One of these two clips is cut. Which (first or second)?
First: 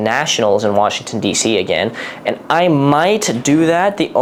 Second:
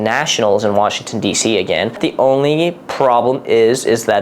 second